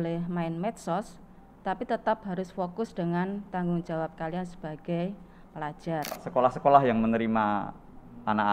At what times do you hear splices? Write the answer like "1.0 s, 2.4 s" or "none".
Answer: 6.2 s